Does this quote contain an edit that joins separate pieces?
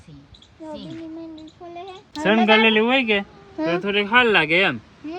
yes; 1 cut; at 2.1 s

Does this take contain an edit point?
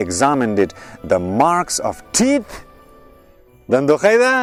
no; 0 cuts

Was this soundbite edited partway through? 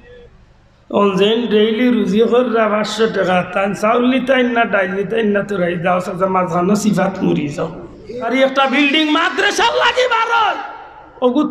yes; 1 cut; at 8.2 s

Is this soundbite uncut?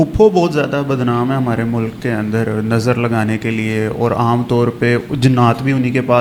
yes; 0 cuts

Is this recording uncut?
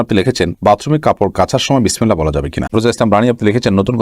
no; 1 cut; at 2.7 s

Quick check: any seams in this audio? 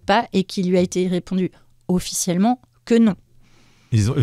no; 0 cuts

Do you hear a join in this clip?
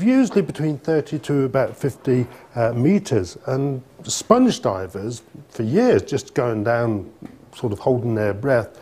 yes; 1 cut; at 2.4 s

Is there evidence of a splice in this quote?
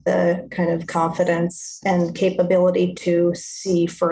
yes; 1 cut; at 1.8 s

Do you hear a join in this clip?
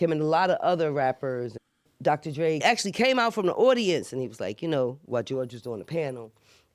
yes; 2 cuts; at 1.6 s, 2.6 s

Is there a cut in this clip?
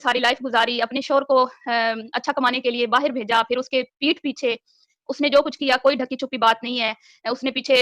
no; 0 cuts

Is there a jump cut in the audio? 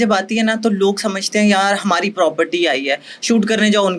no; 0 cuts

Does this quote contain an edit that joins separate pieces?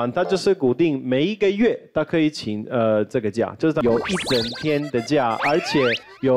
yes; 1 cut; at 3.8 s

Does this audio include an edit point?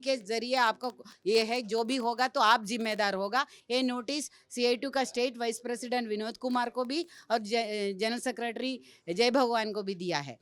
no; 0 cuts

